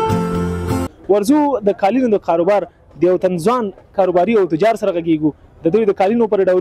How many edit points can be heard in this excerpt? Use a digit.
1